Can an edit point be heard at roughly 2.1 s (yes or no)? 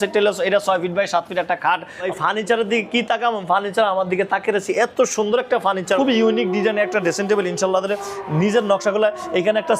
yes